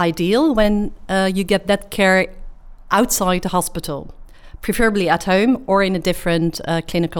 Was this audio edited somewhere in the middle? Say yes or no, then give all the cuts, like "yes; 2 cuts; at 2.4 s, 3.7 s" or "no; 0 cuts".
no; 0 cuts